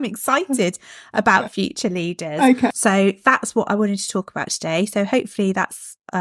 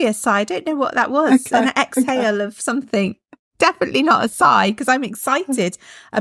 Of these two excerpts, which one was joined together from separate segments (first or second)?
first